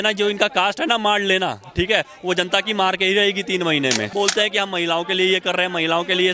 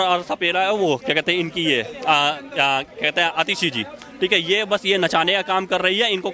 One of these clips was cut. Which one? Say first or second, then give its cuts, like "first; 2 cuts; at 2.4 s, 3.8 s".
first; 1 cut; at 4.1 s